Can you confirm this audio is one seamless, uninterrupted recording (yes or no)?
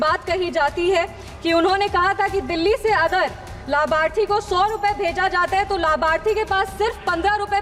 yes